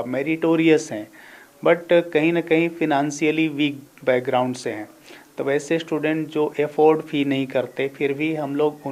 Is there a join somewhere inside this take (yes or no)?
no